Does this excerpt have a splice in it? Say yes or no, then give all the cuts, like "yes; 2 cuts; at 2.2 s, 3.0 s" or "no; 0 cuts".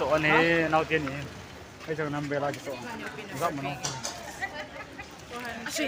no; 0 cuts